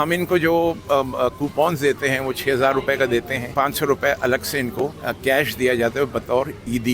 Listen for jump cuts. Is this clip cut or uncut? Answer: cut